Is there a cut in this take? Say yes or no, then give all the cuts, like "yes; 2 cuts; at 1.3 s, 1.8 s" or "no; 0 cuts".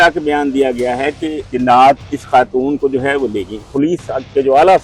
yes; 3 cuts; at 1.4 s, 2.1 s, 3.7 s